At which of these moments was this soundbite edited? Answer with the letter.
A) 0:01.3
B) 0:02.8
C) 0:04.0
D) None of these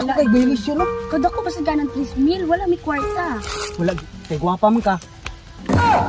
C